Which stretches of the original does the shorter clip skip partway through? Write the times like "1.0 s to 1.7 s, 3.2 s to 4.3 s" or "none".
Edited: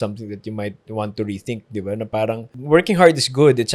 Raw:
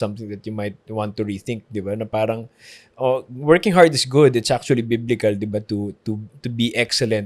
2.6 s to 3.3 s